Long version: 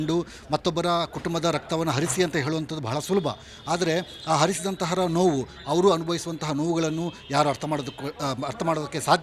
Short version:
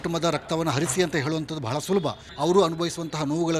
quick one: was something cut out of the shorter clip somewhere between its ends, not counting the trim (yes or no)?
yes